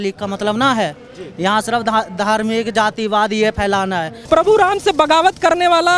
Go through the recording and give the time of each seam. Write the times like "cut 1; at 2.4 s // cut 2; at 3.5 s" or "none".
cut 1; at 4.1 s